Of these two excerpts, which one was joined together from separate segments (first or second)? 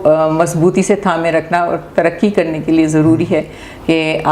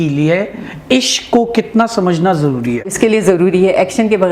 second